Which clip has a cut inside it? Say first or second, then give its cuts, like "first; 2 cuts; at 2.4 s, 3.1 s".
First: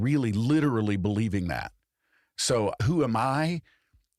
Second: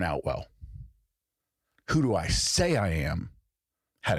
first; 1 cut; at 2.8 s